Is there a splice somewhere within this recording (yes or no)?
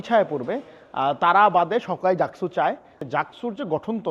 yes